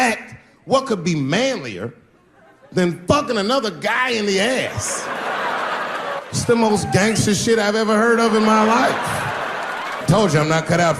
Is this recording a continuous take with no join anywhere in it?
no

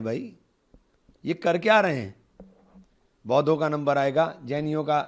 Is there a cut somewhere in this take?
no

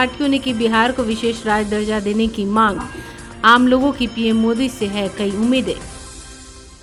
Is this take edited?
no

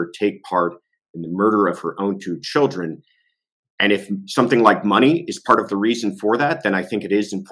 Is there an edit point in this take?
no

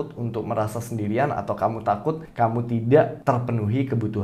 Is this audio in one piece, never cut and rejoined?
no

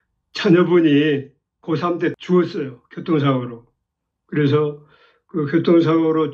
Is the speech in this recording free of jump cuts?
no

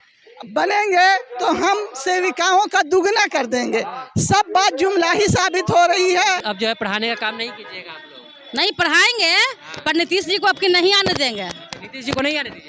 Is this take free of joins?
no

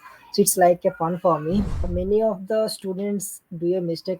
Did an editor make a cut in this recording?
yes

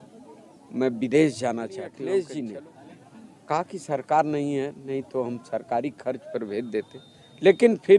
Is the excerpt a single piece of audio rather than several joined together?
no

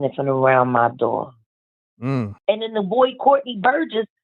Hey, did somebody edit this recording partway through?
yes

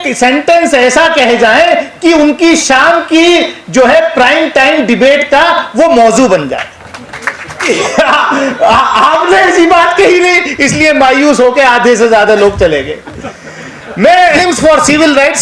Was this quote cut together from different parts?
yes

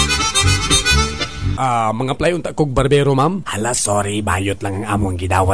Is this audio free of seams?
no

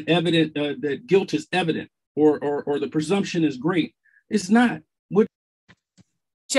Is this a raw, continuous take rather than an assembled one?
no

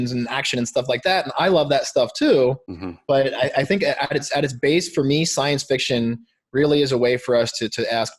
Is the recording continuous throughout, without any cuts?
yes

